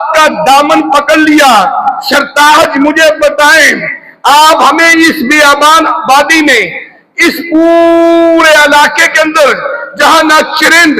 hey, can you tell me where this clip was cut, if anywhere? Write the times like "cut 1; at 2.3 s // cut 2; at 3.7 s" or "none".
none

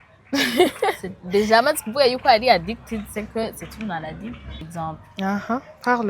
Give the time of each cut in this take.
cut 1; at 4.7 s

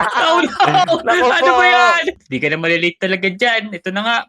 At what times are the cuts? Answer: cut 1; at 2.2 s

